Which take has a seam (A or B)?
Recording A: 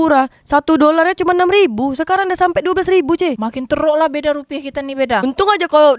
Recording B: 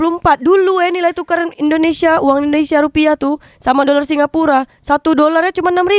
A